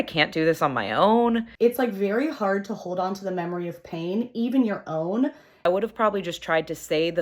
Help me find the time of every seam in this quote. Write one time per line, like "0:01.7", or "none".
0:01.5
0:05.6